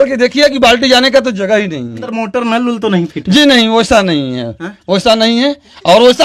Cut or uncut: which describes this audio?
cut